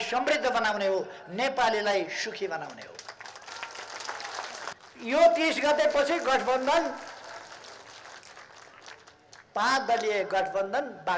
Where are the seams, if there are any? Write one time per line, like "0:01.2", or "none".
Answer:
0:04.7